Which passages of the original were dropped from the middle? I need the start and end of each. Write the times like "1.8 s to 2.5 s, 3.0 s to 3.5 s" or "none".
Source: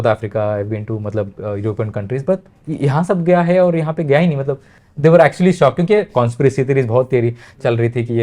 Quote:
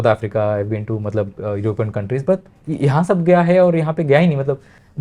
none